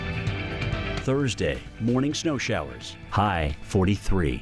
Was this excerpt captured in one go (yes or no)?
no